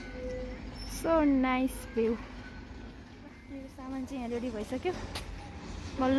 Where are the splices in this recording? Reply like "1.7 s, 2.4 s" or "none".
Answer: 3.5 s